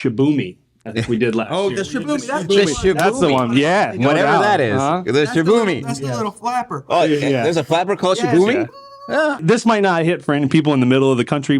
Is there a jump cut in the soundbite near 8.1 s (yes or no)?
no